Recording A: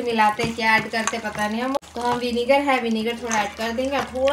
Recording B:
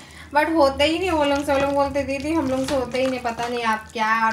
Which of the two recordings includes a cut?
A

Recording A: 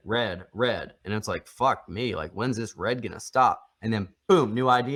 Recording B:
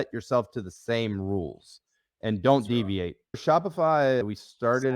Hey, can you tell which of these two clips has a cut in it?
B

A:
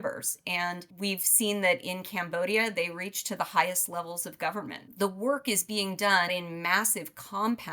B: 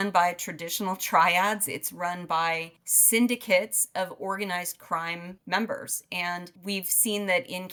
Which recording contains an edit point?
A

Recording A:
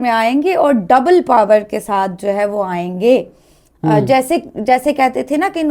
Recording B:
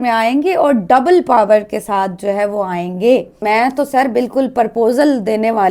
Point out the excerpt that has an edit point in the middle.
B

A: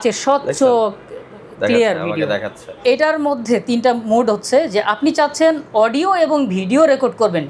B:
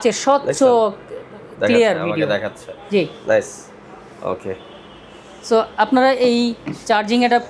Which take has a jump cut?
A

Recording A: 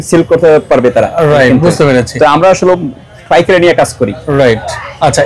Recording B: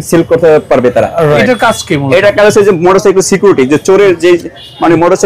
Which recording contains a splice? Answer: B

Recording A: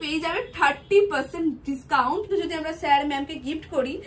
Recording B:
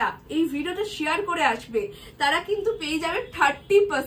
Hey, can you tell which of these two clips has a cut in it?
A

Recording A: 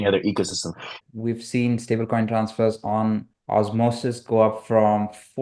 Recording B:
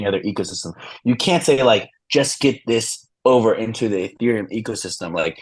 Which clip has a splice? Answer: A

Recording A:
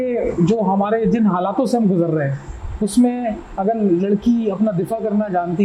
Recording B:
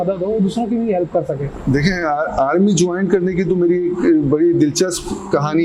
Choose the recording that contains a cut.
B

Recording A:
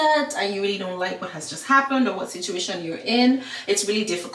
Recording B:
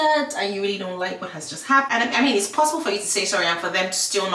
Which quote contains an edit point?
B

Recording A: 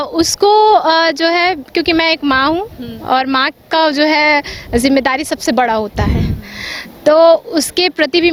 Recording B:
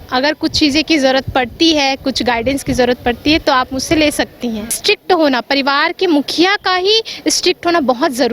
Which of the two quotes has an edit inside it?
B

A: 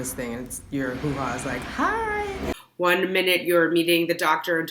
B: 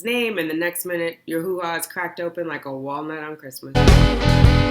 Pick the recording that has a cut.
B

